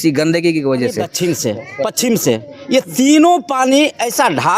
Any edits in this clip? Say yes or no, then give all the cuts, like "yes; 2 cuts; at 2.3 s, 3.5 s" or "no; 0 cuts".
yes; 1 cut; at 1.1 s